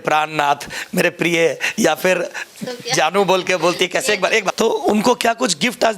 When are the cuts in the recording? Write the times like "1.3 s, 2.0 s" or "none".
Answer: 4.5 s